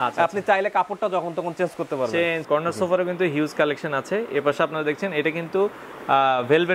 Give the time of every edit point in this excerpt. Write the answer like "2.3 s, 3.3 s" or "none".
2.4 s